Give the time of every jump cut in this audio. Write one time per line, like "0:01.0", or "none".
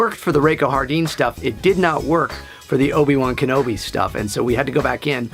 0:02.9

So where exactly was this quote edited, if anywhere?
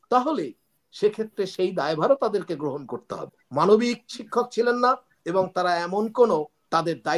0:03.4

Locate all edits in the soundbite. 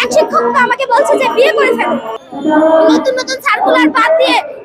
0:02.1

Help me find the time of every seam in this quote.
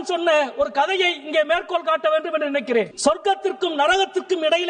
0:02.9

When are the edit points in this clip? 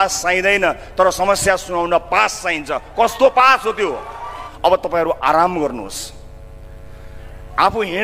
0:04.5

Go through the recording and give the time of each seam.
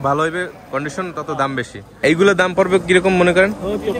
0:01.8

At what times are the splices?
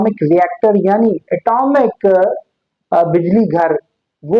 none

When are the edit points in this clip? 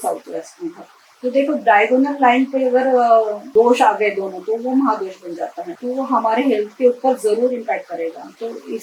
0:03.4
0:05.7

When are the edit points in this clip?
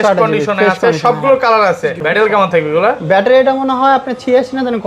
0:02.0

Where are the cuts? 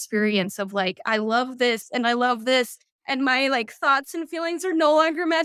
none

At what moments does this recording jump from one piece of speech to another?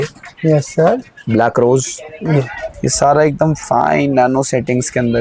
0:02.5

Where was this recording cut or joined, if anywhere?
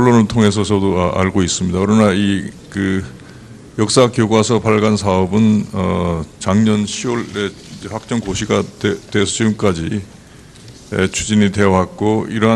0:05.7

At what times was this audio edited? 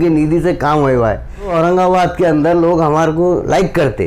0:01.5

